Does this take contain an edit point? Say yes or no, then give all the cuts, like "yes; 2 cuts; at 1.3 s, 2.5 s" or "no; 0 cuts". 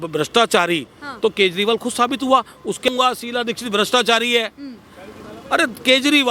yes; 1 cut; at 2.9 s